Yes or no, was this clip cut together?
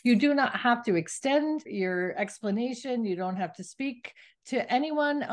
yes